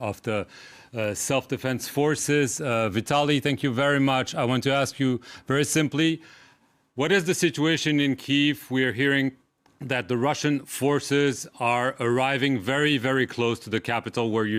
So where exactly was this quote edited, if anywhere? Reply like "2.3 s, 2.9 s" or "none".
none